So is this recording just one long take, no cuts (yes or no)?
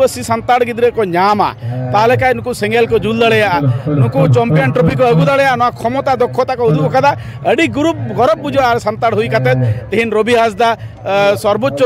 yes